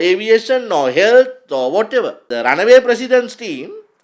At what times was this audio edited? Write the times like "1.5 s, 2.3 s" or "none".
2.3 s